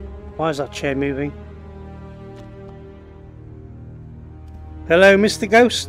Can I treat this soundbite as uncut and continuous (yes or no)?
yes